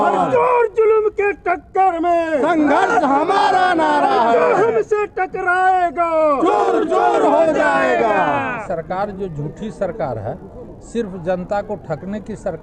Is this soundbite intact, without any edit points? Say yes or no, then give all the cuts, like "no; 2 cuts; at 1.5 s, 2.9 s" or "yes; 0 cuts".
no; 1 cut; at 8.6 s